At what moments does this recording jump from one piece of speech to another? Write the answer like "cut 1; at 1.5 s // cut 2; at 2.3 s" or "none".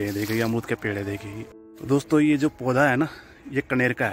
cut 1; at 1.5 s